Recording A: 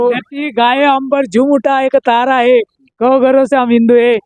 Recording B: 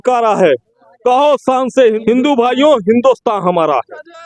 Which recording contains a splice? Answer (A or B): B